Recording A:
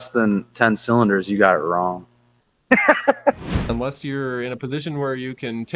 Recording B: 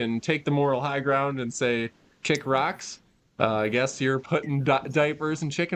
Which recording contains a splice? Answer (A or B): A